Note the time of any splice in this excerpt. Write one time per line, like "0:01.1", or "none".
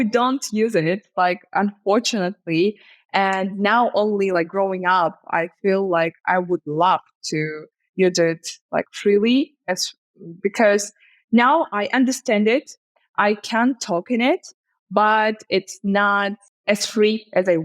0:16.5

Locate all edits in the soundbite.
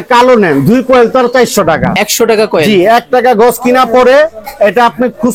0:02.0

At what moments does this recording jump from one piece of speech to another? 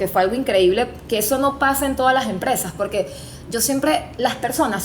none

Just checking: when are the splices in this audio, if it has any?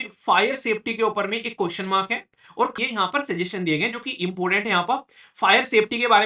0:02.8

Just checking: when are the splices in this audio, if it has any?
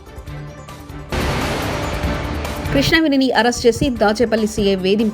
none

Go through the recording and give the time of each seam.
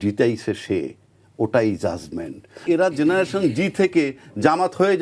0:02.6

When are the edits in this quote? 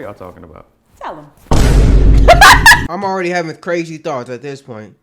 0:02.8

